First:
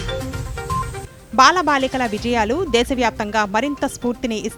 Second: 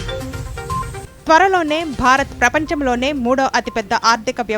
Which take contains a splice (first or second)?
second